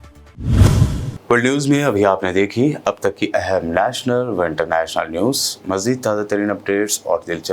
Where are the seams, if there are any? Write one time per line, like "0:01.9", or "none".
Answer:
none